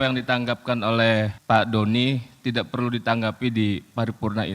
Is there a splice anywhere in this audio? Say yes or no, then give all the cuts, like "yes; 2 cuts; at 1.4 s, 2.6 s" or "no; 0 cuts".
yes; 1 cut; at 1.4 s